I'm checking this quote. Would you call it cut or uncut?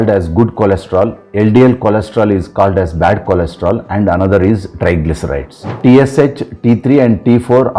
cut